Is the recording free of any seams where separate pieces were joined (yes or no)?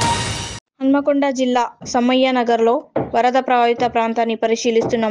yes